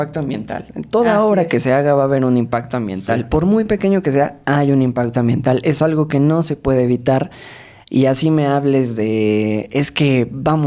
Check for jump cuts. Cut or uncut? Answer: uncut